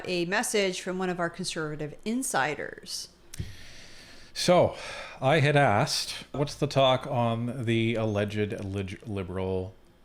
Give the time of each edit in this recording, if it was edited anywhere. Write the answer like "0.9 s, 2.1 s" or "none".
6.4 s